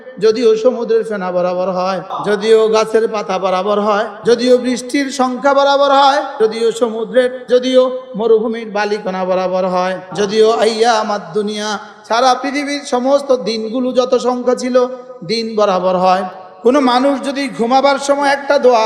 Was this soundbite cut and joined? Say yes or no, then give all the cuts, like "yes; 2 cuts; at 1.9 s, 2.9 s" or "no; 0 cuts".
yes; 6 cuts; at 2.1 s, 4.1 s, 6.3 s, 7.4 s, 10.0 s, 16.4 s